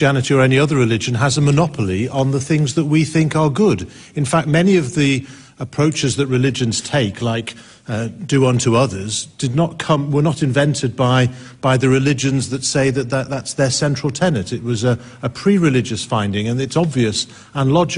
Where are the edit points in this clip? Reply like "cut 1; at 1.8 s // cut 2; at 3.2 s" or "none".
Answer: none